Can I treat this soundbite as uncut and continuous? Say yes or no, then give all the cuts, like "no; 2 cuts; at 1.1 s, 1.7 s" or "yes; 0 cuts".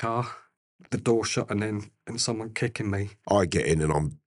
no; 1 cut; at 3.1 s